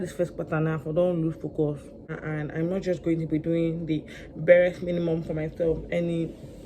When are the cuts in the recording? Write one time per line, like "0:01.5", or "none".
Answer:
0:02.1